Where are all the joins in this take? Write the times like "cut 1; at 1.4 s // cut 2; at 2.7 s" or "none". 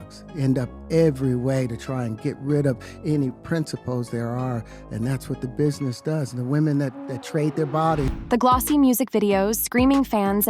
cut 1; at 8.2 s